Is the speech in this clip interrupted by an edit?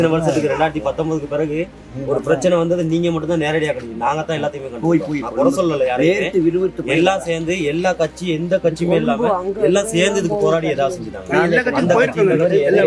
no; 0 cuts

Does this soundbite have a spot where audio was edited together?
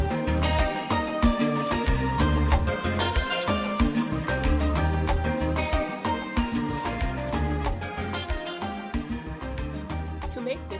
no; 0 cuts

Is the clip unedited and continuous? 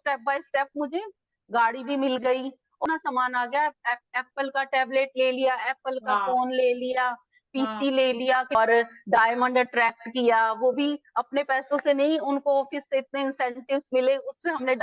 no; 2 cuts; at 2.8 s, 8.5 s

